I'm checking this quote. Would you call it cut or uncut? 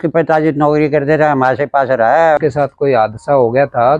cut